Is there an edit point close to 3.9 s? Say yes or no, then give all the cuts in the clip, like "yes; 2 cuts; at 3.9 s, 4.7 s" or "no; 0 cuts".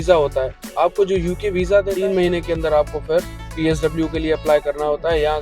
no; 1 cut; at 1.9 s